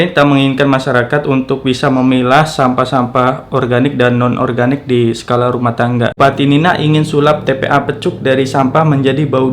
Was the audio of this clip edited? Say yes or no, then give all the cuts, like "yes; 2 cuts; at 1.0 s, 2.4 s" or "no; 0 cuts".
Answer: yes; 1 cut; at 6.2 s